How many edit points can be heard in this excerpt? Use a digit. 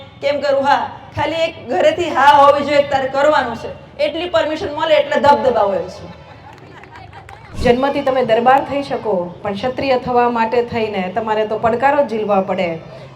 1